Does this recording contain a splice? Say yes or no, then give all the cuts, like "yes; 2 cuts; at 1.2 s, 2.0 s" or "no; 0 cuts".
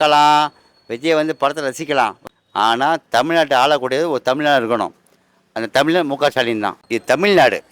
yes; 2 cuts; at 2.2 s, 6.7 s